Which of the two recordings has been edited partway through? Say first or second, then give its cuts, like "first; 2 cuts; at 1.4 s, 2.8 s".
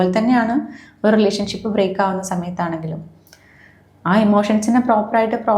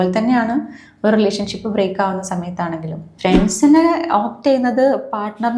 second; 1 cut; at 3.0 s